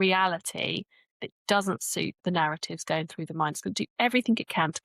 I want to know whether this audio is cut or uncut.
cut